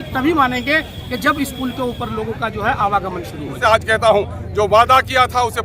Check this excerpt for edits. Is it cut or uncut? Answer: cut